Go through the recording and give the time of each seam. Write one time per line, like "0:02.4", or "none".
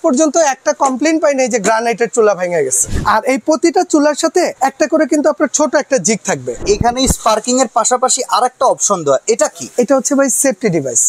0:02.8
0:04.5
0:06.6

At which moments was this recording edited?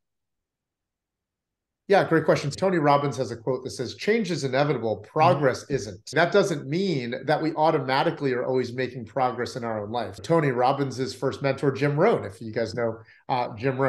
0:02.5
0:06.1
0:10.2

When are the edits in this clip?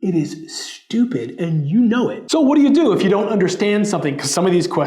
0:02.2

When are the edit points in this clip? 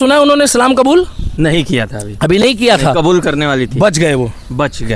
none

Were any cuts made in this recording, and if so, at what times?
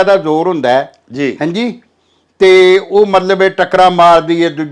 none

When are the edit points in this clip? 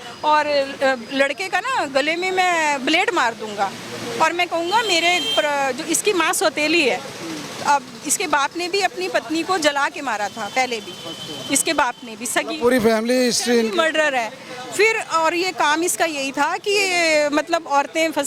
none

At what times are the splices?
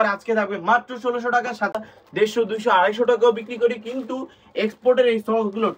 0:01.7

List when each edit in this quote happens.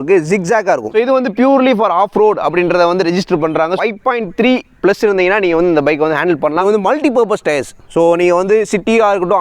0:01.0
0:03.8
0:06.6

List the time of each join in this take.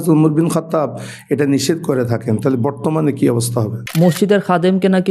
0:03.8

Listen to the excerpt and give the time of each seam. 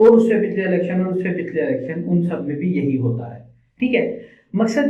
none

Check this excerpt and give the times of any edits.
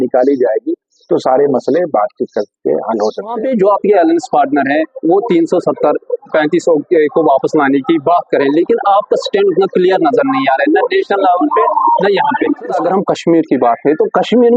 0:03.4
0:12.8

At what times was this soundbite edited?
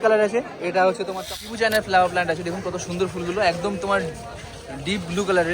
0:01.3

